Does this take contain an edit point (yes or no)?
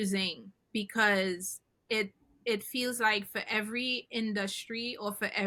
no